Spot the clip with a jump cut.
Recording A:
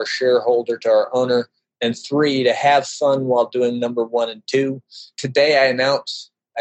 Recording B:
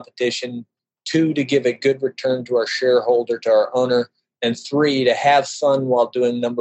A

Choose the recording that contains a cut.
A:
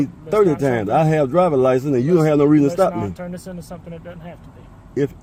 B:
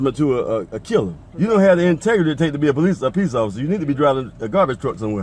B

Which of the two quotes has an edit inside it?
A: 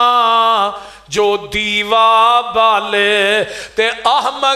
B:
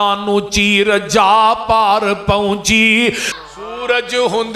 B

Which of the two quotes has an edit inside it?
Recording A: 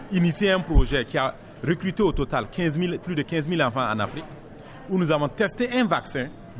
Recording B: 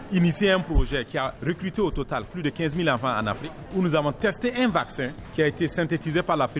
B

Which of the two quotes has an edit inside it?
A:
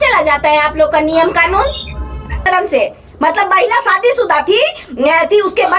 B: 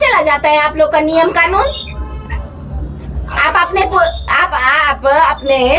A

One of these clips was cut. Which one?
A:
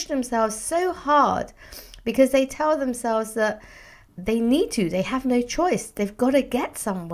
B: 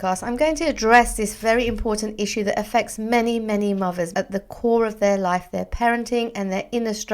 B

